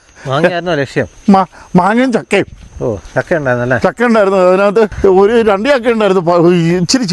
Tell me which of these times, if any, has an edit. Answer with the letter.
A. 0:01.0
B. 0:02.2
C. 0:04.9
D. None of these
C